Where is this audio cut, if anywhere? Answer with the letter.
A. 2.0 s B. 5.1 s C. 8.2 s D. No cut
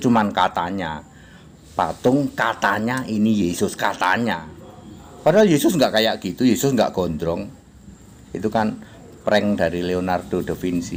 D